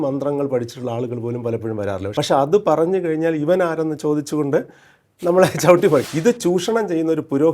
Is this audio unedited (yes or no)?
no